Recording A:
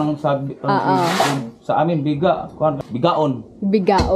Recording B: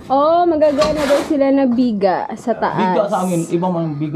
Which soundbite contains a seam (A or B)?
A